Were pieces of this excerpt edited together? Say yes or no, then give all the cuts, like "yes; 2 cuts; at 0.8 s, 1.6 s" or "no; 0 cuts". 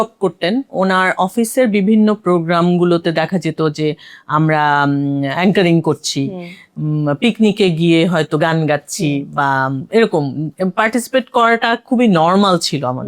no; 0 cuts